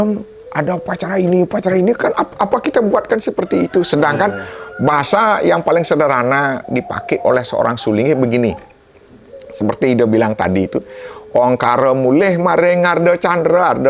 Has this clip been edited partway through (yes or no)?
no